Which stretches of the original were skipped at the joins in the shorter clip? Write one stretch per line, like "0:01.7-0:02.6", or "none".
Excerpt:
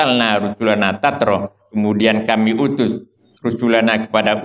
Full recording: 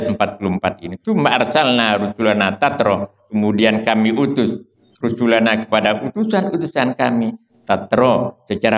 none